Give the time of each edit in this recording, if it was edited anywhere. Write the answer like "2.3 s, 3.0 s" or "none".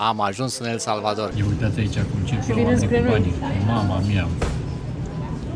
1.3 s